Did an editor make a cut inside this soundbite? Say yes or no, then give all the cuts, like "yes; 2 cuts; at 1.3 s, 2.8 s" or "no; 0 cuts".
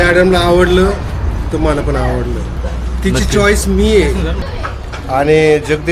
yes; 2 cuts; at 2.6 s, 4.5 s